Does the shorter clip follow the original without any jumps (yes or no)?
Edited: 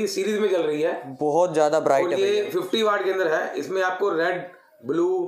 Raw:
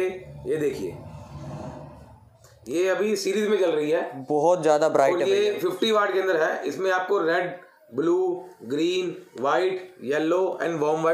yes